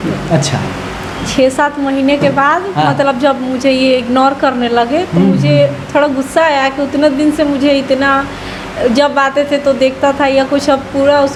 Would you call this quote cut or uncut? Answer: uncut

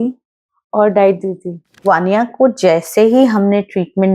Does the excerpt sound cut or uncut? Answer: cut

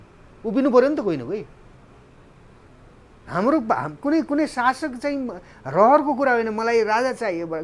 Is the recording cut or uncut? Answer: uncut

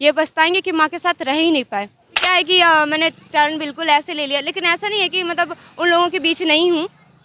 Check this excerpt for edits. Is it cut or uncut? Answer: cut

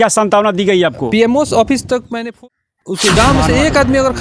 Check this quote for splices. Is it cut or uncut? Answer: cut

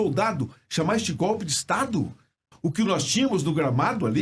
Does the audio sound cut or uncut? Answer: cut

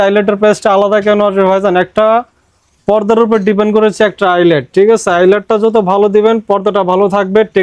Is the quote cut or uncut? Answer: uncut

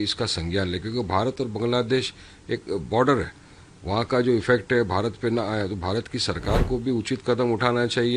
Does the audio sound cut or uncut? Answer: uncut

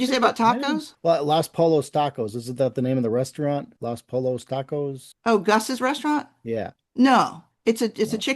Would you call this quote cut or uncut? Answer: cut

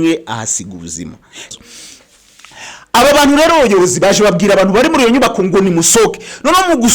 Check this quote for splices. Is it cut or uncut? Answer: cut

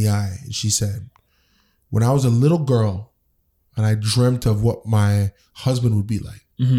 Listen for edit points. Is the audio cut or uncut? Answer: uncut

